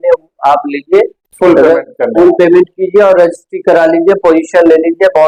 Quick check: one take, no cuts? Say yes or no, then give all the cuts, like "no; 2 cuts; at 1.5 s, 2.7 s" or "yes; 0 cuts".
yes; 0 cuts